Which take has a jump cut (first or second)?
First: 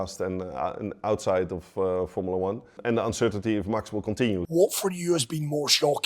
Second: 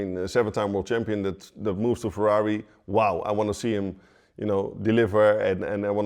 first